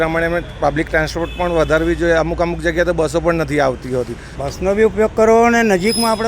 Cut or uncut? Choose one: cut